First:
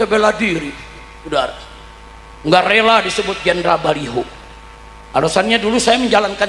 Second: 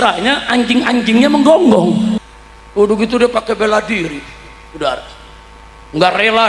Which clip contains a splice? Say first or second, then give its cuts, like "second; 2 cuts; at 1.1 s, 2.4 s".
second; 1 cut; at 2.2 s